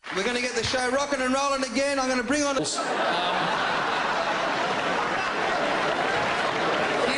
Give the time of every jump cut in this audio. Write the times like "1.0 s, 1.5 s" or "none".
none